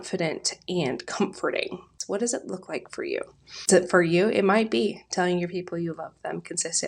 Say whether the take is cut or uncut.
cut